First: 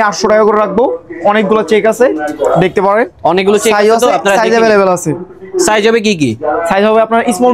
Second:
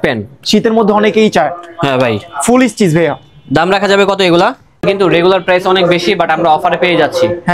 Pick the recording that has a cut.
second; 1 cut; at 4.8 s

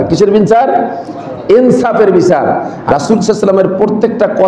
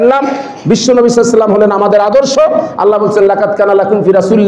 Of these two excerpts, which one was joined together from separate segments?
first; 1 cut; at 2.7 s

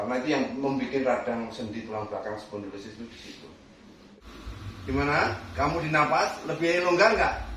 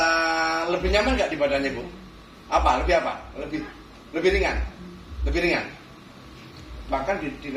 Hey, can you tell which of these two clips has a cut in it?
first; 1 cut; at 4.2 s

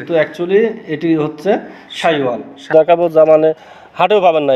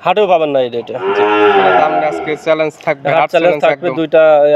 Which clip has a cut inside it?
first; 1 cut; at 2.7 s

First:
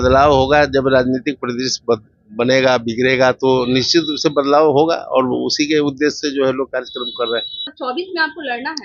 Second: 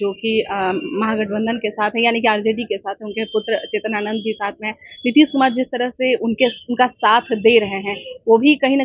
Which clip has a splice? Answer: first; 1 cut; at 7.7 s

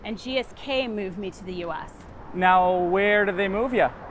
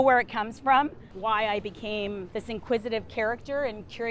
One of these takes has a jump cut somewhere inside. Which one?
second; 1 cut; at 1.1 s

